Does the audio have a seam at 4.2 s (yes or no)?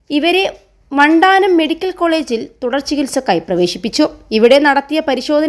yes